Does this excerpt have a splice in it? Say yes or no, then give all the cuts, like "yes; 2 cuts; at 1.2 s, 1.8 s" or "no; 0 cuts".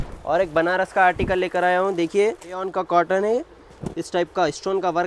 yes; 1 cut; at 2.7 s